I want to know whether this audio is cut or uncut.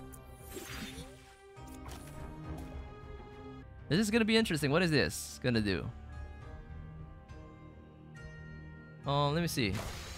cut